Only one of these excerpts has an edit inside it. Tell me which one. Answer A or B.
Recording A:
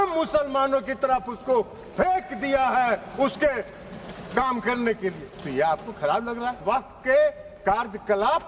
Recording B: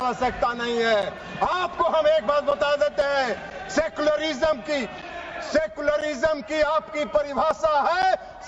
A